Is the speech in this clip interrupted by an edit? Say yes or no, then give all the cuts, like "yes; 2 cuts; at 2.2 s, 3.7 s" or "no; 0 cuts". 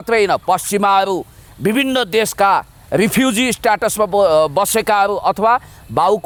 no; 0 cuts